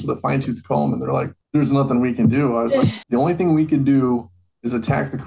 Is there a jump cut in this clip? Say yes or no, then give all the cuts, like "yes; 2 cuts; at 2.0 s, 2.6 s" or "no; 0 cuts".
yes; 2 cuts; at 1.4 s, 3.0 s